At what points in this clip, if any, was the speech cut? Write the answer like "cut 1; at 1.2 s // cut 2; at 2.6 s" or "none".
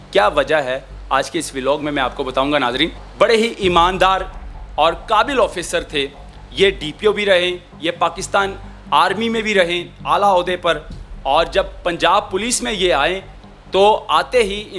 cut 1; at 3.0 s